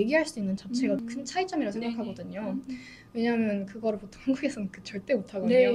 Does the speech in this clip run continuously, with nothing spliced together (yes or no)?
no